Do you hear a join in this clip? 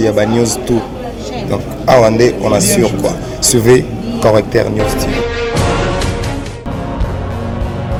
no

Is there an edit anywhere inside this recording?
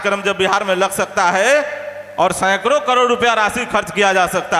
no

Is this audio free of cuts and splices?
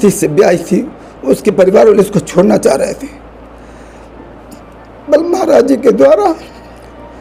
yes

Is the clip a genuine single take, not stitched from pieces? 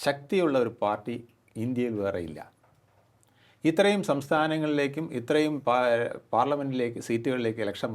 yes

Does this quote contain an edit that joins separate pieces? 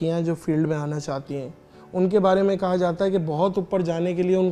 no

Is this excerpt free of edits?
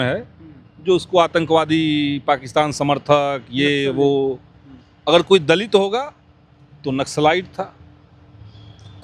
yes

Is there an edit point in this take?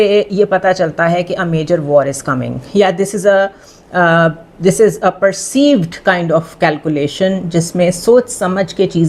no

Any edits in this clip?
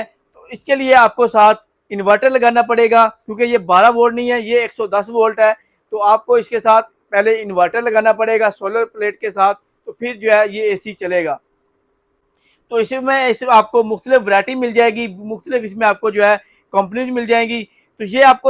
no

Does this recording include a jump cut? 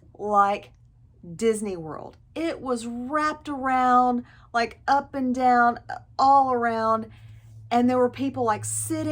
no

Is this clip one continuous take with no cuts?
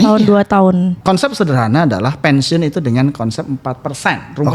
no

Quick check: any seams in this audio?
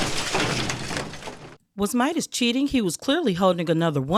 no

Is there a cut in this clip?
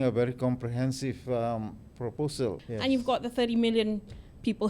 yes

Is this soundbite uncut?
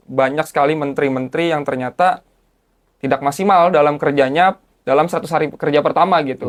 yes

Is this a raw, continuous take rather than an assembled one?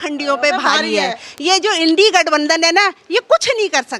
yes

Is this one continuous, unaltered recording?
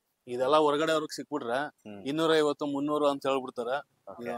yes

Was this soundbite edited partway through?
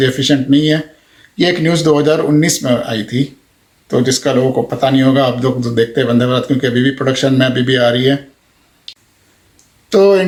no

